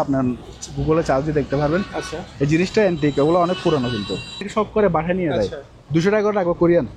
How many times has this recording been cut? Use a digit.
1